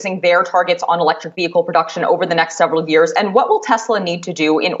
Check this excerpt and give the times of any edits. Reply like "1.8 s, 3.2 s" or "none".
3.1 s